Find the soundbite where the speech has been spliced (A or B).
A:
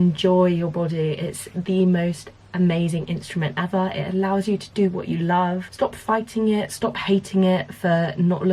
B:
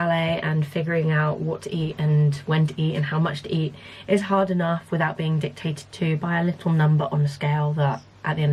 A